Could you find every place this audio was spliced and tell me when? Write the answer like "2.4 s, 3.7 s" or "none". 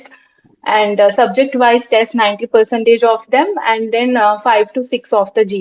none